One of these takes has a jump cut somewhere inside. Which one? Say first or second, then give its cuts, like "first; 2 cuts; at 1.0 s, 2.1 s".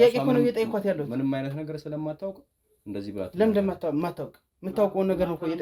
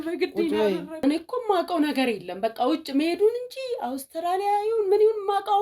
second; 1 cut; at 0.9 s